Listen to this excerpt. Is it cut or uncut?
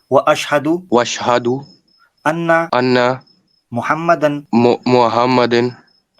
cut